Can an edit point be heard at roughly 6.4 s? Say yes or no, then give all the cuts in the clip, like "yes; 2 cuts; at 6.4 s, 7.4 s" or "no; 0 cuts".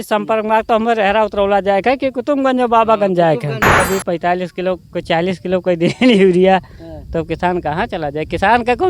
no; 1 cut; at 3.8 s